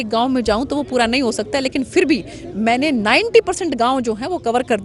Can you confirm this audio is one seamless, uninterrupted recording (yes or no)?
yes